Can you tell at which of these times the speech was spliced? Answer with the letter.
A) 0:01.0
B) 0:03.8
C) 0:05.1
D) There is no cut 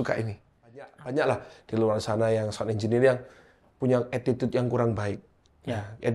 A